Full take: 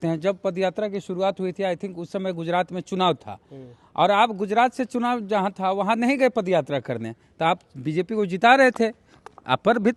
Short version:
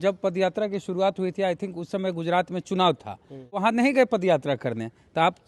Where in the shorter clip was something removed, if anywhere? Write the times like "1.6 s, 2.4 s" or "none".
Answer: 3.6 s